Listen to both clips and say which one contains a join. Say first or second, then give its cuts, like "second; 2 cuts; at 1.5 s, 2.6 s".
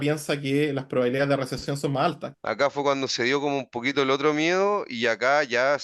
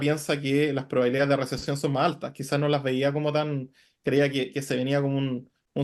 first; 1 cut; at 2.3 s